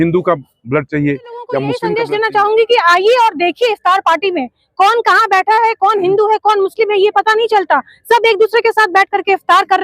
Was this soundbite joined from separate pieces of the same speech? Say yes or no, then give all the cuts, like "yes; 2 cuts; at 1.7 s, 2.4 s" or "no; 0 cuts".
yes; 1 cut; at 1.8 s